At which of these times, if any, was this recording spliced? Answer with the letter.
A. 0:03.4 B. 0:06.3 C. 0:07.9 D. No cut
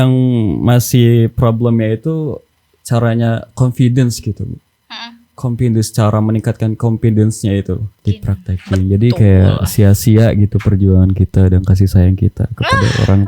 C